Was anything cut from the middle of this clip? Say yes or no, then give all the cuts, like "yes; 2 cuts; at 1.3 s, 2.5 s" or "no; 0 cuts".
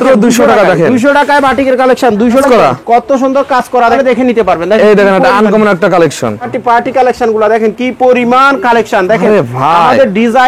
yes; 3 cuts; at 2.5 s, 4.0 s, 6.5 s